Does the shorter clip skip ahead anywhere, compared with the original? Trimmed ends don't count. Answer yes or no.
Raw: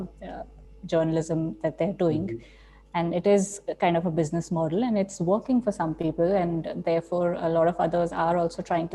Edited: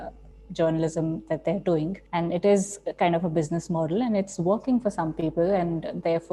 yes